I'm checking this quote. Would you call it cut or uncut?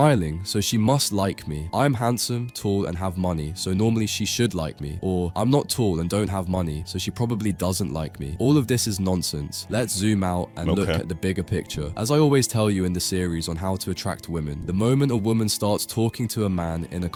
uncut